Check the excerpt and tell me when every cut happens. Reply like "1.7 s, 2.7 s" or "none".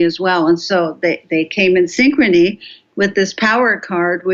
none